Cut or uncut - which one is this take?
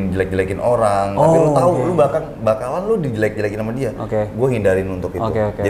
uncut